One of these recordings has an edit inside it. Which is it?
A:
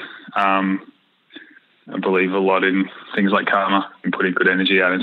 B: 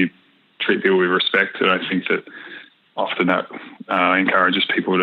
A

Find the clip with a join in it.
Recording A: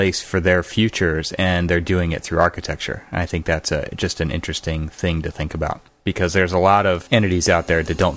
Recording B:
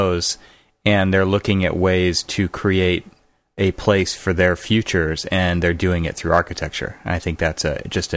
A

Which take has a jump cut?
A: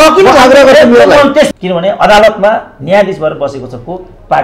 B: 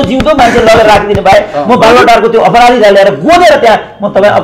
A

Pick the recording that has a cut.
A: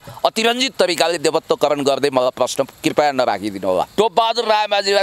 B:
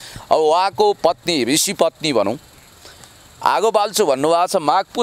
A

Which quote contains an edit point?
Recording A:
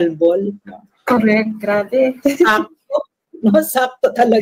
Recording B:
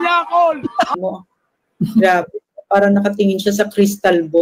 B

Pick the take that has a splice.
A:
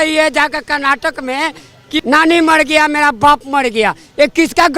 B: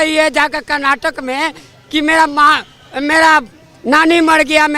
A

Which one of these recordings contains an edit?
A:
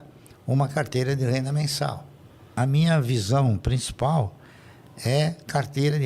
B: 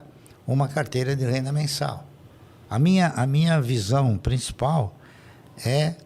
A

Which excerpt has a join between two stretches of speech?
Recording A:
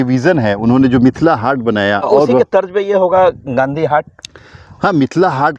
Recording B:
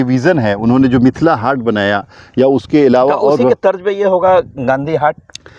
A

